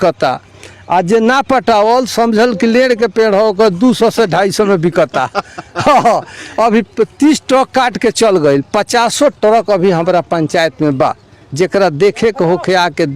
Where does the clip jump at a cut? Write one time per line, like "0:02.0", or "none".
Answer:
none